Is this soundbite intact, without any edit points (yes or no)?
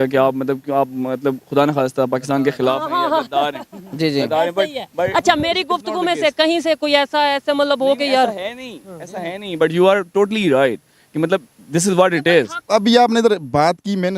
no